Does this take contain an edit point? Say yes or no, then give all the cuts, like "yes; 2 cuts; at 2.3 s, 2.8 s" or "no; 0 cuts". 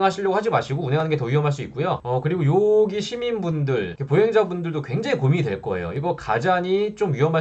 no; 0 cuts